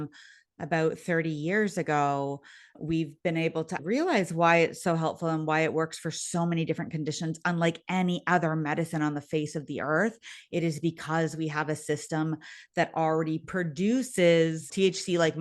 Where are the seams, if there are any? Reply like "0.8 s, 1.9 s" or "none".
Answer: 3.8 s